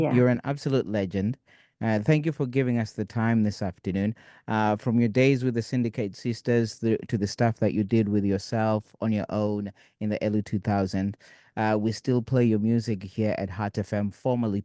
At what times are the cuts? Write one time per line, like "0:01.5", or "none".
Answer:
none